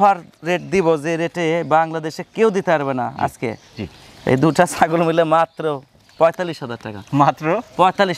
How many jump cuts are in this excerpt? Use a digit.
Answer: 0